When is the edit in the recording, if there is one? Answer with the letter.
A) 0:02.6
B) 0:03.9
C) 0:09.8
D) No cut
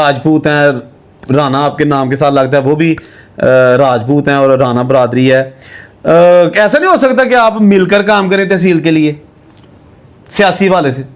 D